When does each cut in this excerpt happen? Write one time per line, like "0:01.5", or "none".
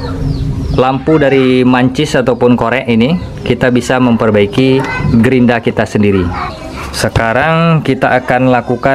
0:06.5